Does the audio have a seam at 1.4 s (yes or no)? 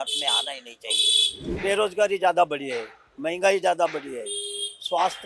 yes